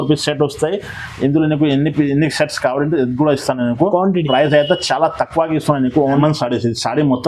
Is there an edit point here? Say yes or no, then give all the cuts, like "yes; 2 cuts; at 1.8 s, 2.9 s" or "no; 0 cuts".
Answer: yes; 1 cut; at 6.2 s